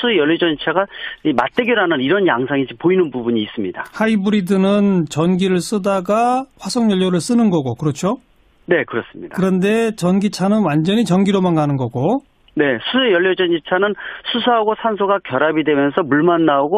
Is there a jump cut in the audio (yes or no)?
yes